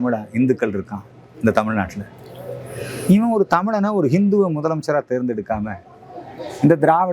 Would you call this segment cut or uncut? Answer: uncut